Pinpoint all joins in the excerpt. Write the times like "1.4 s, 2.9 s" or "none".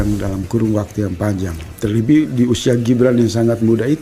none

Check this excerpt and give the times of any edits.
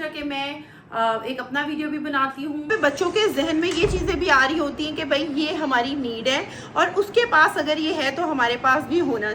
2.7 s

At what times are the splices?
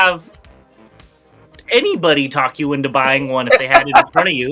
none

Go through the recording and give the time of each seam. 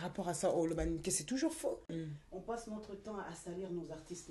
1.9 s

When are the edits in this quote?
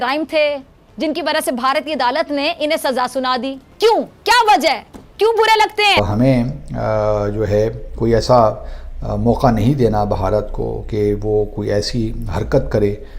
3.6 s, 6.0 s

